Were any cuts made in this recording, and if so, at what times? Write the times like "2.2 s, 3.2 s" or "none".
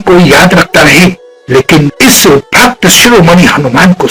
none